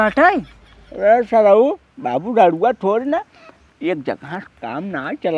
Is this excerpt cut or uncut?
uncut